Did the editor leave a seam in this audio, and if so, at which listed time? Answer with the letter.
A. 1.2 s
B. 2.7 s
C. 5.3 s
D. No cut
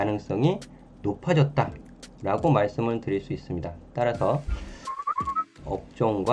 C